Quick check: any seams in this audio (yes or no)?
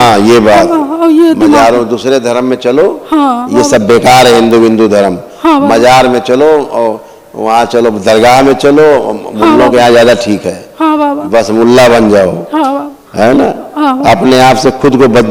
no